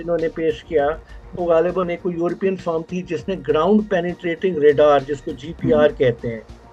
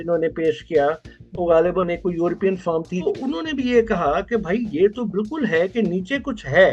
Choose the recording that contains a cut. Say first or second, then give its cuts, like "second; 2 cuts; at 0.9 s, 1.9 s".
second; 1 cut; at 3.0 s